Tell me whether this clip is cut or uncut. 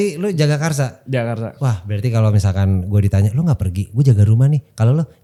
uncut